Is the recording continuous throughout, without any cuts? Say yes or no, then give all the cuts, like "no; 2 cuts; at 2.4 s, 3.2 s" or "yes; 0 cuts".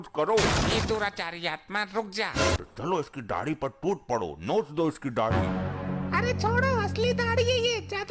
no; 1 cut; at 2.6 s